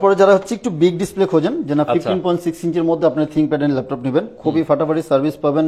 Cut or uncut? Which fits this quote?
uncut